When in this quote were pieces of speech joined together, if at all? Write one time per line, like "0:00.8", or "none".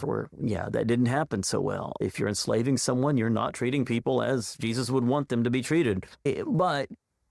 none

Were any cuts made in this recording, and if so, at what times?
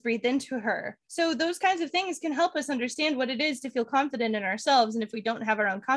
0:01.0

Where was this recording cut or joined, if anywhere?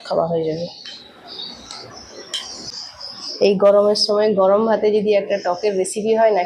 0:02.7

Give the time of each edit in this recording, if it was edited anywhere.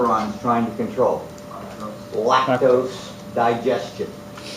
0:03.1

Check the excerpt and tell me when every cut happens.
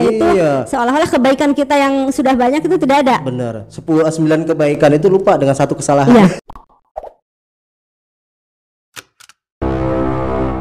0:06.4

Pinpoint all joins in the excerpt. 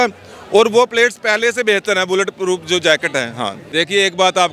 0:03.6

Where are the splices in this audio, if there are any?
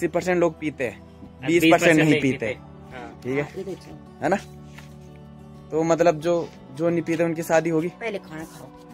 none

